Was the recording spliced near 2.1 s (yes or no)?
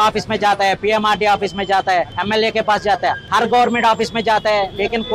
yes